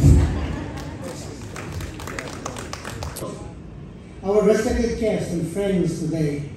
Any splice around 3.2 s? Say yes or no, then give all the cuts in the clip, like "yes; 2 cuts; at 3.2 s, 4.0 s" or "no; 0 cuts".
yes; 1 cut; at 3.2 s